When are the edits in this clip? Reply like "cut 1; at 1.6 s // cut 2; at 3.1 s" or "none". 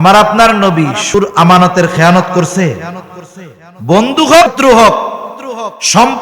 cut 1; at 1.1 s // cut 2; at 4.5 s